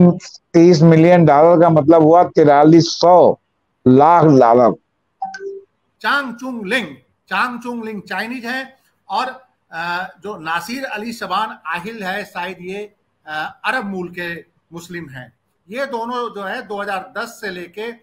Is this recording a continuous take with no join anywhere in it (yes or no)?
no